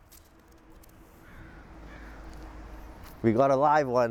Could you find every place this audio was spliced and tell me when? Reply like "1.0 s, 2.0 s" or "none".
none